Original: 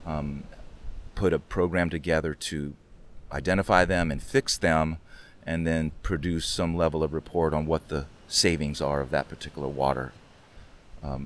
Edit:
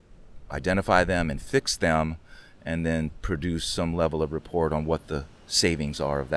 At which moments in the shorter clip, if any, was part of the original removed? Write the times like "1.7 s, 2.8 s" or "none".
none